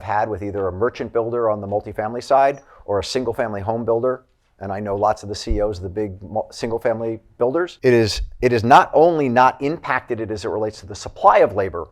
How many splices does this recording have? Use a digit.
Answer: 1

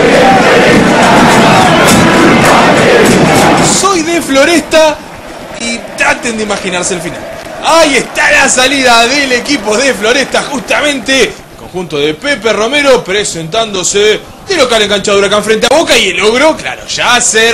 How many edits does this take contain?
1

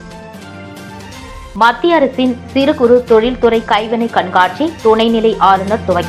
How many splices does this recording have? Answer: 1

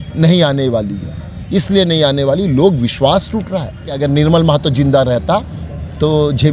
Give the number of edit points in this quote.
1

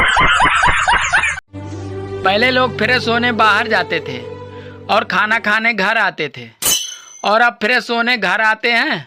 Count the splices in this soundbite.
1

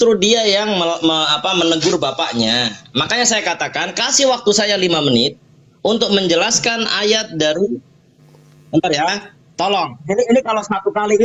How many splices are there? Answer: 0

